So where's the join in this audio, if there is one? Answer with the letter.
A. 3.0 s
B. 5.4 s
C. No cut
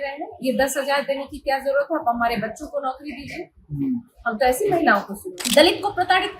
B